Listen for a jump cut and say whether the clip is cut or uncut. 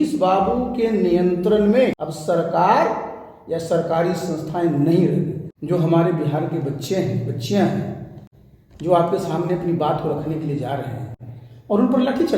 cut